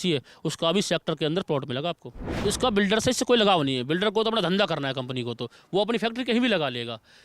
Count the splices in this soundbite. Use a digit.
1